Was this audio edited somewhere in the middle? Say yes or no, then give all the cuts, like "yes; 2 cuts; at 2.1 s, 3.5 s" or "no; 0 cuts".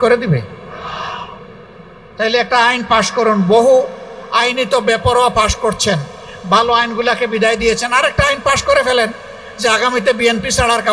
no; 0 cuts